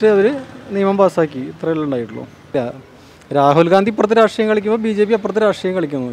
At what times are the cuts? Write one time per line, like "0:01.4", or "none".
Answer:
0:02.5